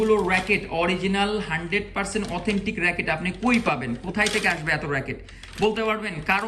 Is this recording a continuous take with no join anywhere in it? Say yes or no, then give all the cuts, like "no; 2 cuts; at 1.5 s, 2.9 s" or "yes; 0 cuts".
yes; 0 cuts